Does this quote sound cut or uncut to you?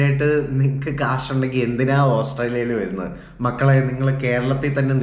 uncut